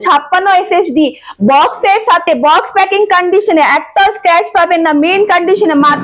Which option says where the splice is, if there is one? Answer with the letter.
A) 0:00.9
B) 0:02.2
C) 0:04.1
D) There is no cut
D